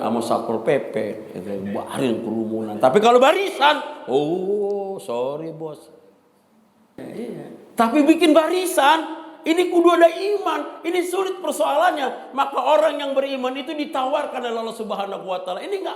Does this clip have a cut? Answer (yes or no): yes